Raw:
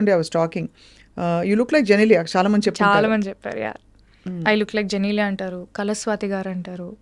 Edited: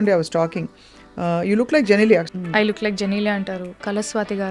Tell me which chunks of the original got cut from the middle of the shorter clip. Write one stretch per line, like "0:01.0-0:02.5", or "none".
0:02.3-0:04.2